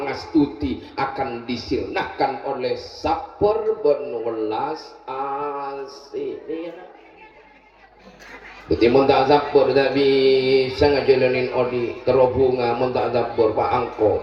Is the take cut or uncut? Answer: uncut